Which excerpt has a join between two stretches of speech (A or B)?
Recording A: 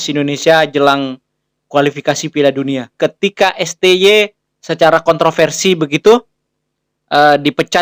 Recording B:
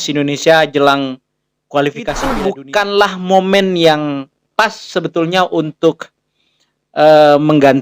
B